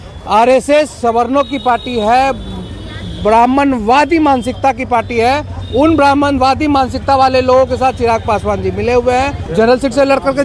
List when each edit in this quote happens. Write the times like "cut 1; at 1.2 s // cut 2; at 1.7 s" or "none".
cut 1; at 9.4 s